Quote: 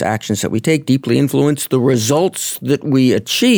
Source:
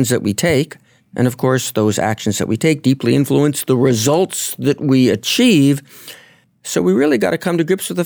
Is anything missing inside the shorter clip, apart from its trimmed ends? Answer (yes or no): no